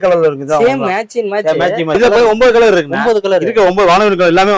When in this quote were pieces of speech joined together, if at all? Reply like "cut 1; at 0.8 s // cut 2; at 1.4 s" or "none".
cut 1; at 1.9 s